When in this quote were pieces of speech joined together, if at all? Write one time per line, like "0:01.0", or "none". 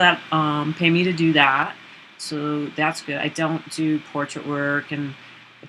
0:01.6